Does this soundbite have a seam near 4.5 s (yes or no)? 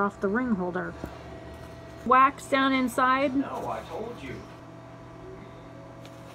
yes